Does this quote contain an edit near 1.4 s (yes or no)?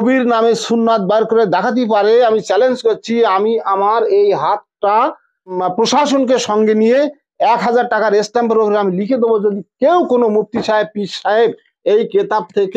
no